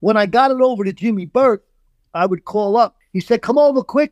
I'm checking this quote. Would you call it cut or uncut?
cut